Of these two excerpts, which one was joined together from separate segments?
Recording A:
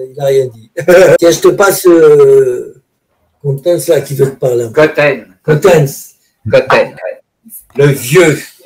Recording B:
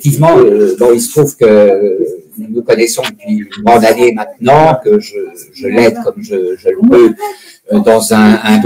A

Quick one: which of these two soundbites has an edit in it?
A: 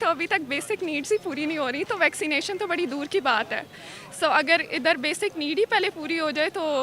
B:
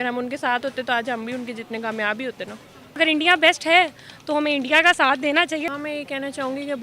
B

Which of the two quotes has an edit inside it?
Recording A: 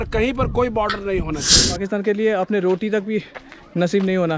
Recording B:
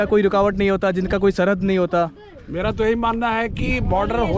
A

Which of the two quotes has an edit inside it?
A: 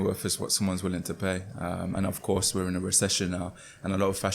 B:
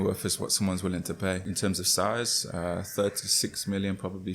B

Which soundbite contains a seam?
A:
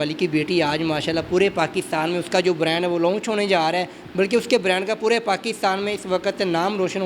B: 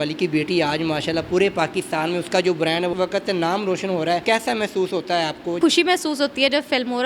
B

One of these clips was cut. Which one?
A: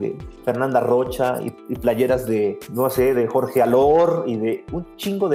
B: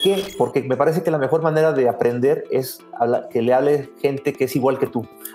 A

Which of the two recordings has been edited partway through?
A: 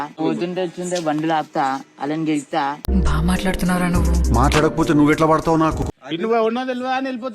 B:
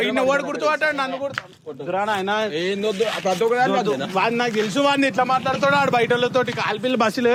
A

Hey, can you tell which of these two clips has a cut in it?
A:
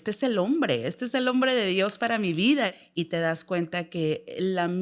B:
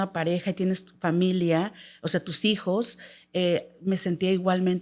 A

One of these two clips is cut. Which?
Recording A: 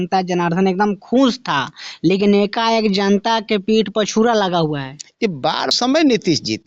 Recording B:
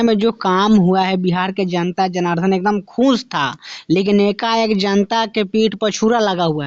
A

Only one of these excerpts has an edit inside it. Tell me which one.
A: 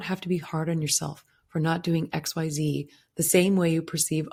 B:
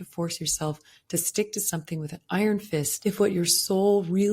B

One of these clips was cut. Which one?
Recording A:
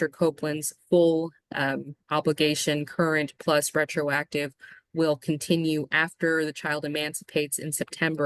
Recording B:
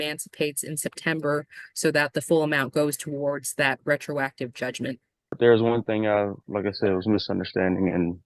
B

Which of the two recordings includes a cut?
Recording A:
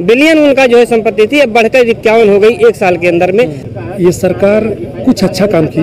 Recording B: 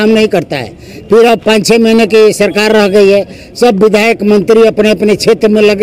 A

